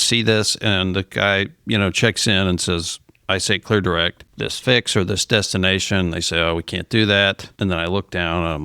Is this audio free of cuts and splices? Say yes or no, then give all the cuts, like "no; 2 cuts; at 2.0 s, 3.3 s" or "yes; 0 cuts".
no; 2 cuts; at 4.2 s, 7.5 s